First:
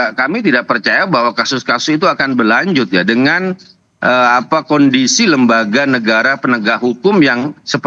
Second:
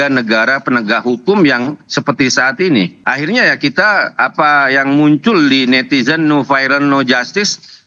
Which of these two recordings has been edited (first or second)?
second